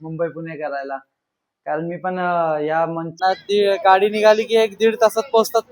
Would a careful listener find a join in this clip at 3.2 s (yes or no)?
yes